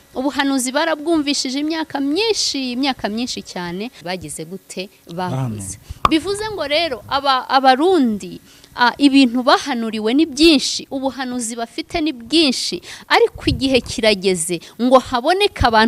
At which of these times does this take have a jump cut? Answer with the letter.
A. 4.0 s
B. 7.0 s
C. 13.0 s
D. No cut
A